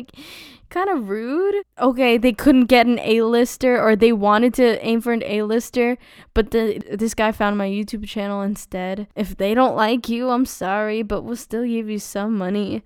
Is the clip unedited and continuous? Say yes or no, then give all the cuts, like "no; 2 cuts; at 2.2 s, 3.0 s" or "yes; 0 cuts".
no; 1 cut; at 9.1 s